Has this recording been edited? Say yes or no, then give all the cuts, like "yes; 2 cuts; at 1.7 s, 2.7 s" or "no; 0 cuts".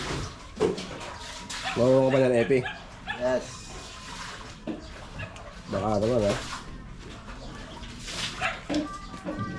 no; 0 cuts